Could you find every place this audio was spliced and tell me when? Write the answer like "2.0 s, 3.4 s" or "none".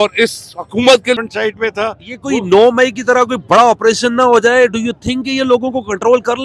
1.2 s